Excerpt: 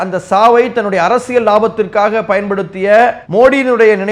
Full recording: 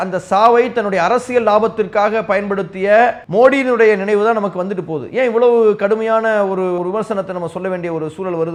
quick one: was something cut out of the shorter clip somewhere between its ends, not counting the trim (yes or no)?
no